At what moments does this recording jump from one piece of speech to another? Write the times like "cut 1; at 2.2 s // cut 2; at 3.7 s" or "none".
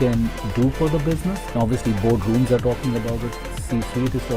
cut 1; at 1.4 s